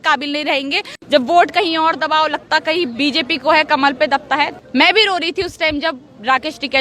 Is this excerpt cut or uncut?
cut